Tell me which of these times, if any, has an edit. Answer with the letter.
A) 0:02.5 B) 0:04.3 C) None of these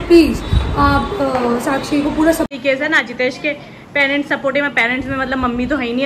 A